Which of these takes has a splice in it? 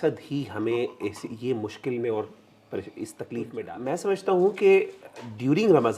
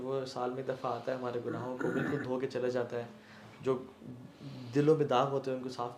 first; 1 cut; at 3.6 s

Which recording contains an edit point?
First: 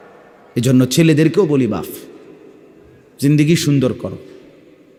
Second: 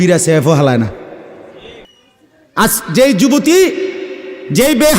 second; 1 cut; at 1.9 s

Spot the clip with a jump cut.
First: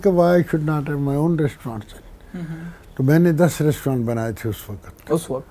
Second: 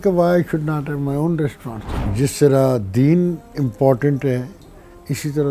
second; 1 cut; at 2.1 s

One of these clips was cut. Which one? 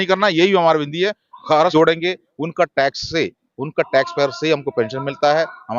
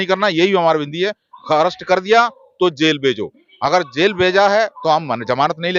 first; 1 cut; at 1.7 s

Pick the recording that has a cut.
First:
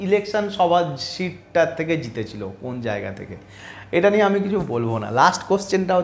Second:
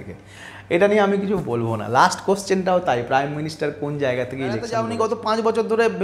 second; 1 cut; at 4.8 s

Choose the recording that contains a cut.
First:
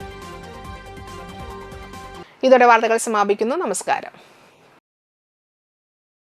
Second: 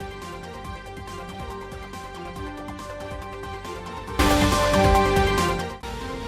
second; 1 cut; at 2.2 s

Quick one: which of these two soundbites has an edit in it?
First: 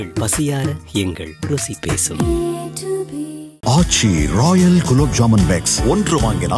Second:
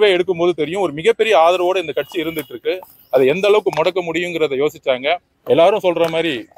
second; 1 cut; at 5.3 s

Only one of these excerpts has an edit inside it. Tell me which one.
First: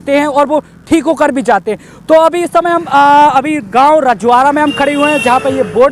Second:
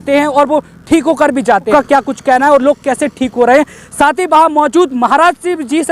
second; 1 cut; at 1.7 s

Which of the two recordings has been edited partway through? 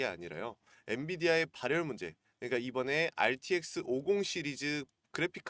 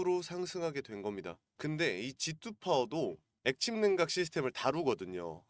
second; 2 cuts; at 1.5 s, 3.3 s

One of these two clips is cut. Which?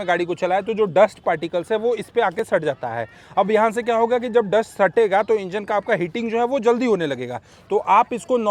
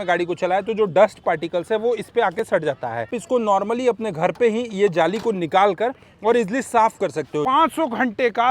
second; 2 cuts; at 3.2 s, 7.4 s

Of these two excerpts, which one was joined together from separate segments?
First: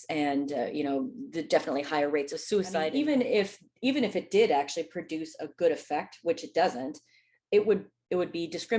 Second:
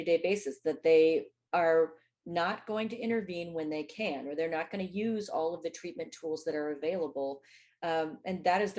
first; 1 cut; at 2.9 s

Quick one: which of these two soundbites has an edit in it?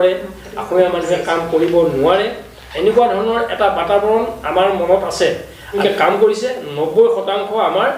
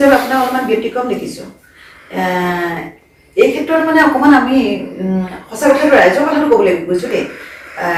first; 1 cut; at 5.8 s

